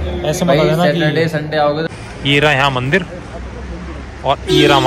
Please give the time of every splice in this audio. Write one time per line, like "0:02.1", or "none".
0:01.9